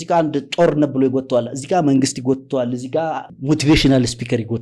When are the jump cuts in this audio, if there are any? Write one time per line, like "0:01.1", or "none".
0:03.3